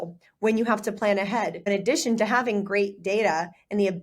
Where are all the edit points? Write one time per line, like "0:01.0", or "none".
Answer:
0:01.7